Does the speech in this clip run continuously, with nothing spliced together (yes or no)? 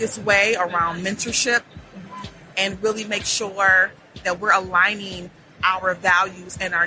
no